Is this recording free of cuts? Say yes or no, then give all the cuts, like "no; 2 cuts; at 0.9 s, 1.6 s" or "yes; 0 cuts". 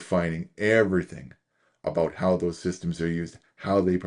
yes; 0 cuts